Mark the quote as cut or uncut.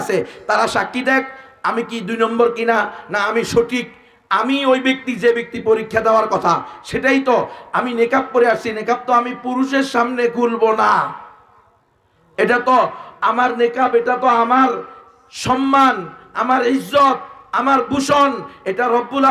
uncut